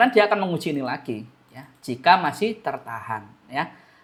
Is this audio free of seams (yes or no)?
yes